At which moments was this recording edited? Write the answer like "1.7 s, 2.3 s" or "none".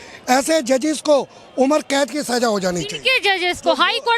none